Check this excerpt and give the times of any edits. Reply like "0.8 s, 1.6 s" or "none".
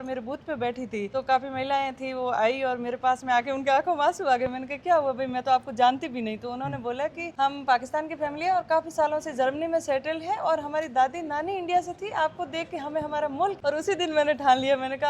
1.1 s, 7.2 s, 13.6 s